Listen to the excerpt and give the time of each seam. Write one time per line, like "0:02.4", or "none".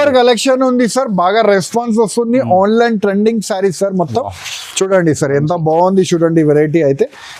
none

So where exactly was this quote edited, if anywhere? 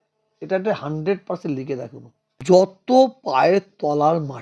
0:02.4

